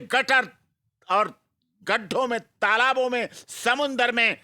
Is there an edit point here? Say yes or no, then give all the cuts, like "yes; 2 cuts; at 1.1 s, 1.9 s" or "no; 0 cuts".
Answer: no; 0 cuts